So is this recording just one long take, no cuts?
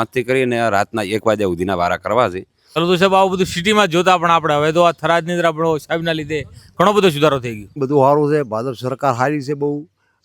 no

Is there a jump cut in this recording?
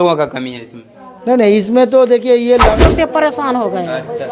yes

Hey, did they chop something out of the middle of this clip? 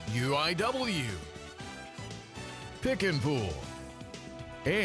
yes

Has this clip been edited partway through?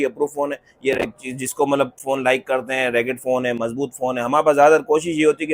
no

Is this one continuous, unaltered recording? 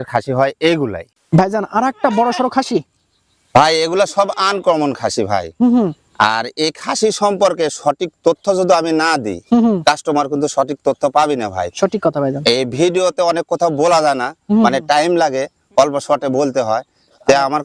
yes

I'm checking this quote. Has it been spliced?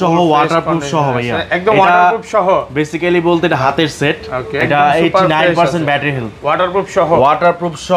yes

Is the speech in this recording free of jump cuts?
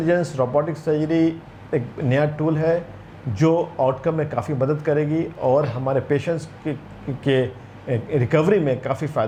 yes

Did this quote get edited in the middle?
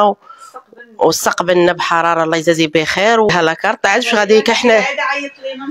yes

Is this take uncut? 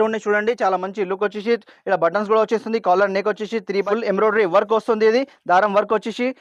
no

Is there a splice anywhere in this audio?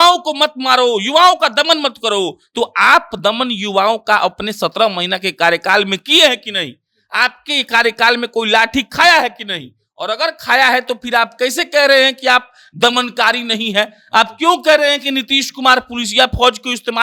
no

